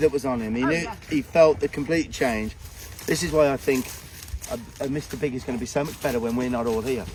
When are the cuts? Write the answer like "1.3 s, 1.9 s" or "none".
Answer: none